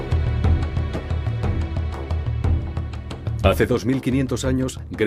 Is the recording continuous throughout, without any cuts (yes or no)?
no